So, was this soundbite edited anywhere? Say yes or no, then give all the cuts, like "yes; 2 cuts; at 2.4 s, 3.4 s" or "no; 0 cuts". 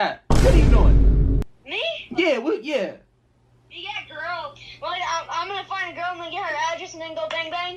no; 0 cuts